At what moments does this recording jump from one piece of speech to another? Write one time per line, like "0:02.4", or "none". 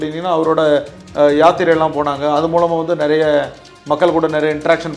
none